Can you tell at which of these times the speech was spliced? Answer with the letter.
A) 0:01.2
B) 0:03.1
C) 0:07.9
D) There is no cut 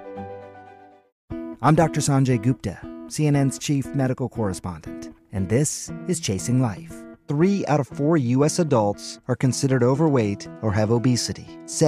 A